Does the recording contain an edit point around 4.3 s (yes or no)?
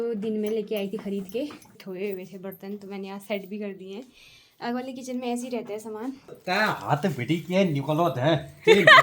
no